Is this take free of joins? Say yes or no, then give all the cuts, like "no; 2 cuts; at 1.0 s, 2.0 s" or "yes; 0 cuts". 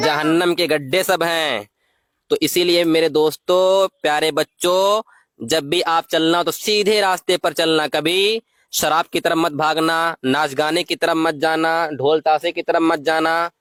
yes; 0 cuts